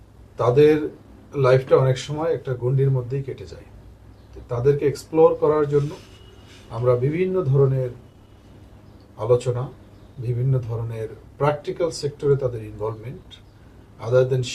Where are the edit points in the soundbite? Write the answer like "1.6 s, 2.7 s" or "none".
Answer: none